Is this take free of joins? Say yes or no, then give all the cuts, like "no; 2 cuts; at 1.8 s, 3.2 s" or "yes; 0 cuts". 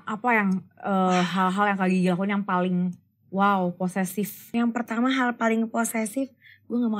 no; 1 cut; at 4.4 s